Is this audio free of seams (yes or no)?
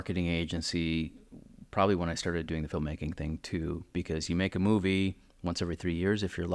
yes